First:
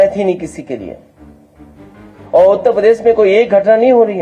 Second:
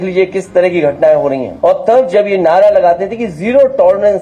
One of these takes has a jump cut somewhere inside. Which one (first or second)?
second